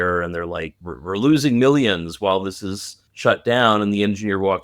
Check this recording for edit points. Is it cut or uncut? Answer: uncut